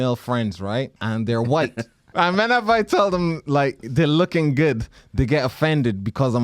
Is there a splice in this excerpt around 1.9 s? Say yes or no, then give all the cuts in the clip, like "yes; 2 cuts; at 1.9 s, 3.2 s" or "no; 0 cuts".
yes; 2 cuts; at 1.0 s, 1.9 s